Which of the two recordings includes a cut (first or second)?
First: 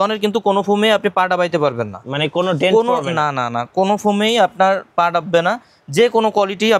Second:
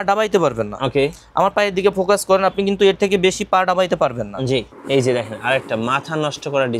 second